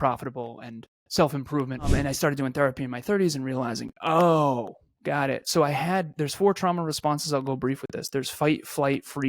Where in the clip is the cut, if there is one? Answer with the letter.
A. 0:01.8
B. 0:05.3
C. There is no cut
A